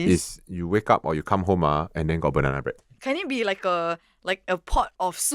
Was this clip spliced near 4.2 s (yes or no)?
no